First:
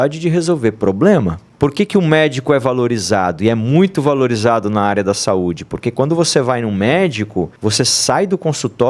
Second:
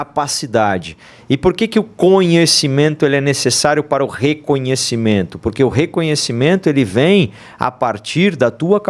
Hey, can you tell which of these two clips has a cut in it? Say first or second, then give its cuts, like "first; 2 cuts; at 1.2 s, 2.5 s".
first; 2 cuts; at 1.4 s, 7.5 s